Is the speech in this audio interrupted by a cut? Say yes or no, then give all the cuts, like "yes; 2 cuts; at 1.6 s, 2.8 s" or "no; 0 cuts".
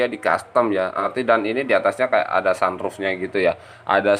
yes; 1 cut; at 1.1 s